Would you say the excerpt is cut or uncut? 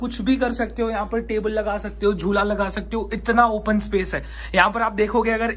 uncut